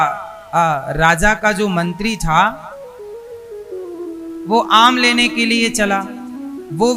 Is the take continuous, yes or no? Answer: yes